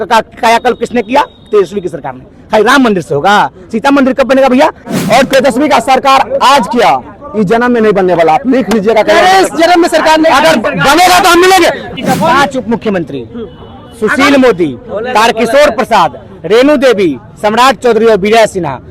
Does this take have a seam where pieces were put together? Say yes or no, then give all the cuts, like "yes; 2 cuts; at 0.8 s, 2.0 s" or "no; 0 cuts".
yes; 2 cuts; at 4.9 s, 11.9 s